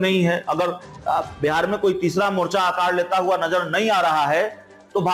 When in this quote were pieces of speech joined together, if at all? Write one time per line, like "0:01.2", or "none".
none